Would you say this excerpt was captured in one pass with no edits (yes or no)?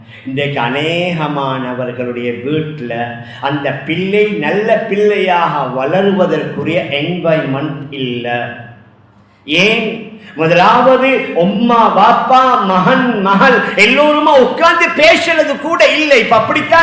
yes